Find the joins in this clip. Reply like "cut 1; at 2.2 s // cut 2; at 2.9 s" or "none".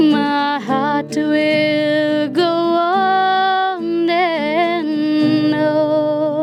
none